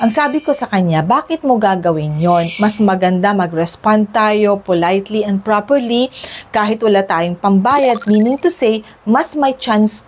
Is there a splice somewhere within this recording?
yes; 2 cuts; at 2.5 s, 8.0 s

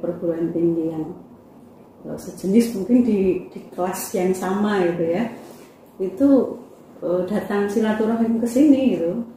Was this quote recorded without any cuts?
yes; 0 cuts

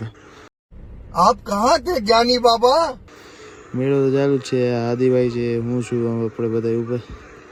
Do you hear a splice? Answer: no; 0 cuts

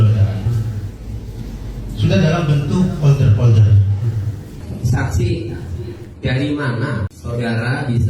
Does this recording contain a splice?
yes; 2 cuts; at 4.6 s, 7.2 s

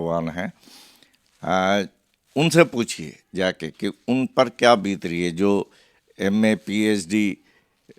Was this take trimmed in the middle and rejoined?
no; 0 cuts

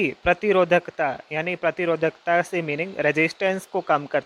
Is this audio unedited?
yes; 0 cuts

